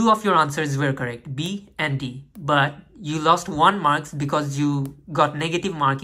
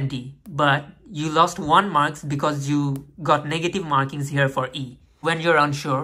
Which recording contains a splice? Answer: second; 1 cut; at 5.1 s

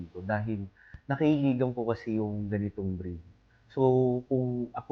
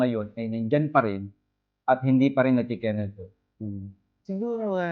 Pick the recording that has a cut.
second; 1 cut; at 3.6 s

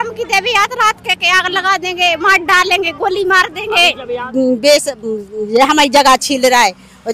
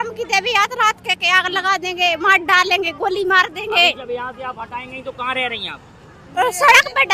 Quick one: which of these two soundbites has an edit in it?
first; 1 cut; at 4.3 s

